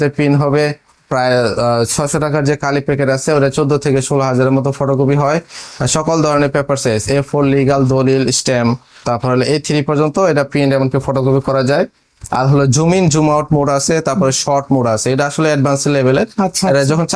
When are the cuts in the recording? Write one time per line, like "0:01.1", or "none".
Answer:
none